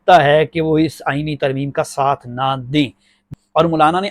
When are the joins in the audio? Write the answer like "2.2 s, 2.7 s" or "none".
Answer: 3.2 s